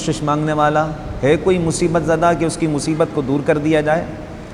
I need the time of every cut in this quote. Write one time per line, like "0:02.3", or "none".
none